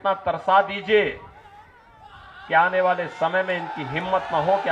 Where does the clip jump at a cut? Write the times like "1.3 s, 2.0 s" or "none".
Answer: none